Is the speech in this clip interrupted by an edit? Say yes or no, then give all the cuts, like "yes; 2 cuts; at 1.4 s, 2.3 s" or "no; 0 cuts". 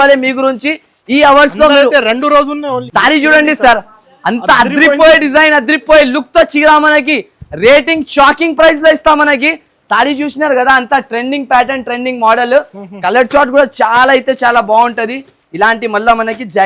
yes; 1 cut; at 2.8 s